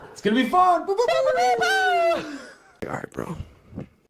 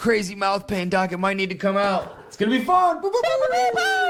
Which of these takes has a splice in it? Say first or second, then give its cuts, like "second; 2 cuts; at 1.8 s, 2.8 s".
first; 1 cut; at 2.9 s